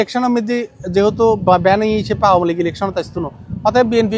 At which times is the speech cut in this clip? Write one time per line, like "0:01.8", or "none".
none

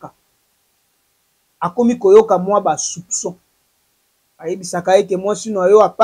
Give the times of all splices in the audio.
none

